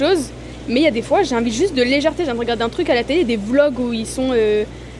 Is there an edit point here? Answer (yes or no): no